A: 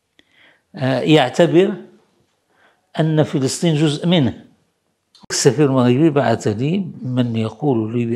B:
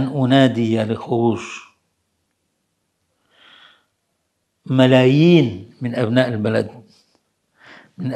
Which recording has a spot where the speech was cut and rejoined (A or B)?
A